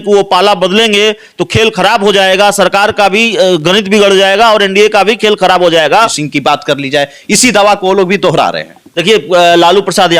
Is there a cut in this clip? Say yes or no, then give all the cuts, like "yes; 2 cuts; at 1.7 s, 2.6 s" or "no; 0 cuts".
yes; 1 cut; at 6.2 s